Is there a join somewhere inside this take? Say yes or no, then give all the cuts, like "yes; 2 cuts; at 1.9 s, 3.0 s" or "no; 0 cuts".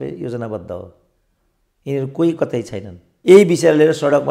yes; 1 cut; at 3.0 s